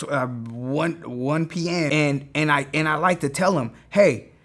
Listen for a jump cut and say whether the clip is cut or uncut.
cut